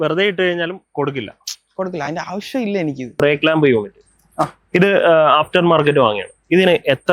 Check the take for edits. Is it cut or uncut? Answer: cut